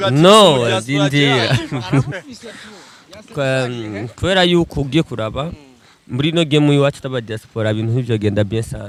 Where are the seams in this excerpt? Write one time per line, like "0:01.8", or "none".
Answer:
none